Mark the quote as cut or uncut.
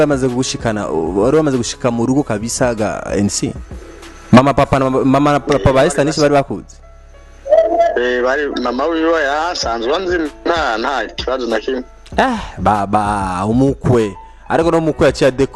uncut